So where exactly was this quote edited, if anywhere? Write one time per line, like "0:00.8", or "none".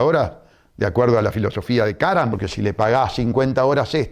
0:02.4